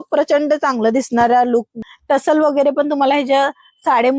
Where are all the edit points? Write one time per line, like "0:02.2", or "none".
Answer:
0:01.9